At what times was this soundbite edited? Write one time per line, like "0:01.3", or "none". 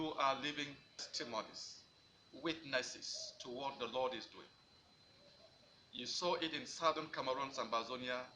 0:01.0